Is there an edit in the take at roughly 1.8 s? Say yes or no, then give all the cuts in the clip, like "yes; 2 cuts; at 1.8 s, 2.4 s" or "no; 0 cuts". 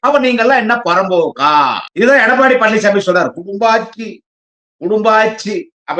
yes; 1 cut; at 1.8 s